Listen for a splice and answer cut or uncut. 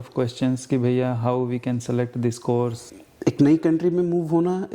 cut